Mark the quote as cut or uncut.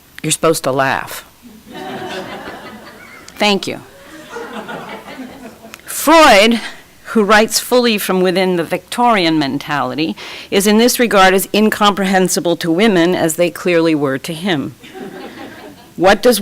cut